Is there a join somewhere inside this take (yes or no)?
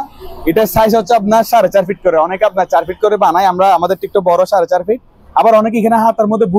no